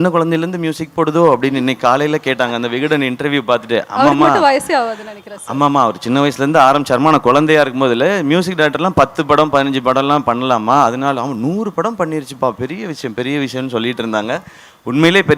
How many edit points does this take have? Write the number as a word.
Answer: zero